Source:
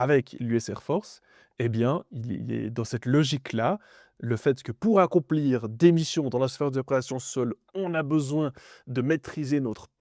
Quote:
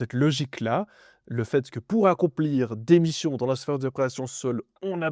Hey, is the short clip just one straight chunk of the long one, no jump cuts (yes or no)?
yes